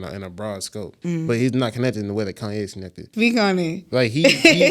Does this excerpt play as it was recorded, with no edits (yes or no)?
no